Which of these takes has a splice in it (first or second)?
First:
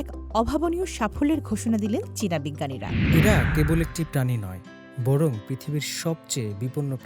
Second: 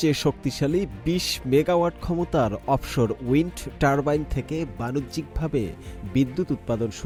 first